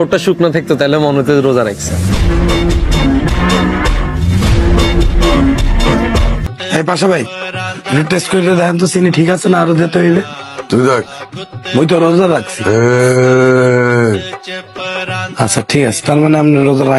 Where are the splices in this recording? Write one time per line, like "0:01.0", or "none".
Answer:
0:06.5